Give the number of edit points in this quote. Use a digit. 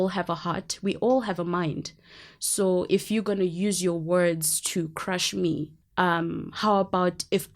1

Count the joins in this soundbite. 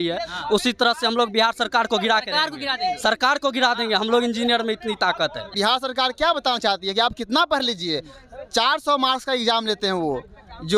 1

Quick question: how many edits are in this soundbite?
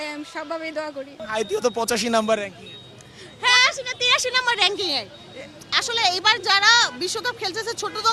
0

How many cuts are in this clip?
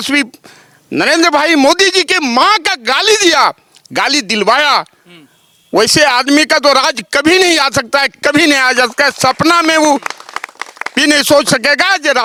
0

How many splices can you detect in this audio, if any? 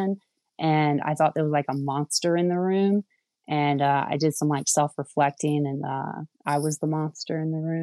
0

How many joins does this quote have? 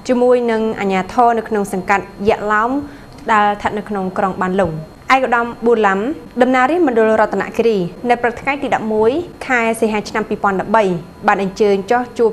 4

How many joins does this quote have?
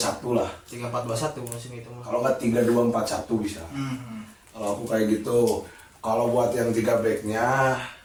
0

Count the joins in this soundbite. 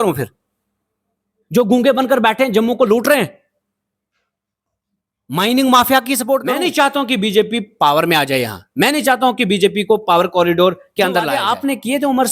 2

